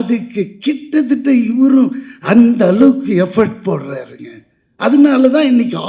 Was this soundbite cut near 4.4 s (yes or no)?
no